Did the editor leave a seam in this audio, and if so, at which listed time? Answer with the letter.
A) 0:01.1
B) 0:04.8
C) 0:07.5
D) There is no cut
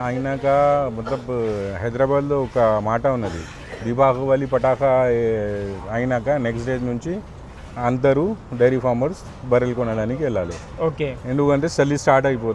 D